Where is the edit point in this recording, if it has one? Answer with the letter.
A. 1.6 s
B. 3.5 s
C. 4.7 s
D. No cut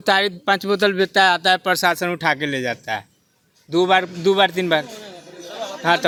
D